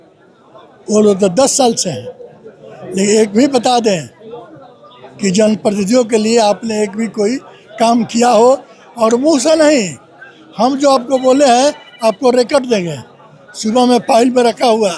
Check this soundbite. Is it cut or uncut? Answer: uncut